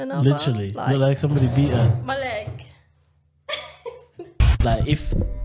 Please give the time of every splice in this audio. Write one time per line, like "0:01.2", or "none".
0:04.5